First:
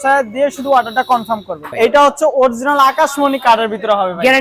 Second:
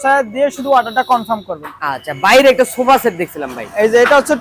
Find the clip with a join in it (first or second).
first